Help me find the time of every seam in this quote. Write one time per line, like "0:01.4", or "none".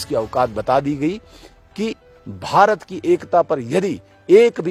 none